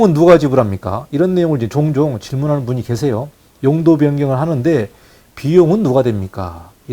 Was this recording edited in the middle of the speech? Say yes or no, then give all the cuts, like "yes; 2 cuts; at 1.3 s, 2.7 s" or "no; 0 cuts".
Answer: no; 0 cuts